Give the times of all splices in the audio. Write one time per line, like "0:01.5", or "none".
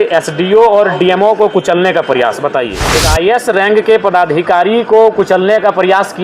0:02.8